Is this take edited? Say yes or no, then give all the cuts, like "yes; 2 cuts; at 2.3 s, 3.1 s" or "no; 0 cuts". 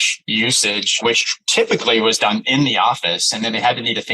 yes; 1 cut; at 1.4 s